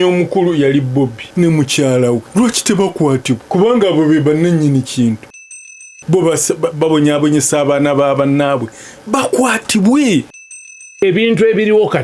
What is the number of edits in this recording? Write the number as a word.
five